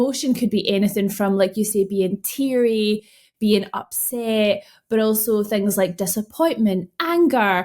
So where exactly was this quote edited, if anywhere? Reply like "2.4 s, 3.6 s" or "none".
none